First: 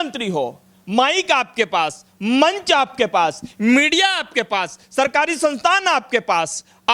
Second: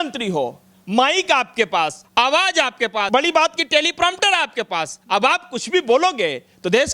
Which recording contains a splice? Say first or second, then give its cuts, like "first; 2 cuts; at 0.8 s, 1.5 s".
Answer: second; 2 cuts; at 2.0 s, 3.1 s